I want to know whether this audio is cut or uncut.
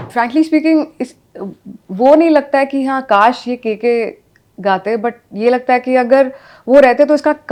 uncut